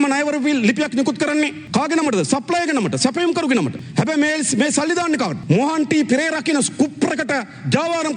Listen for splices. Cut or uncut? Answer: cut